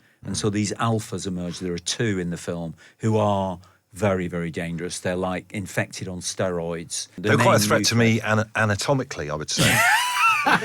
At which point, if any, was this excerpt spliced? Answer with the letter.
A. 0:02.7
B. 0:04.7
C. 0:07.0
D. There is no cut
C